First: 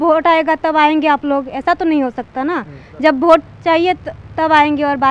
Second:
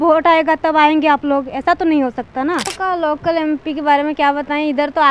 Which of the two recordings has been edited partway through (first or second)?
second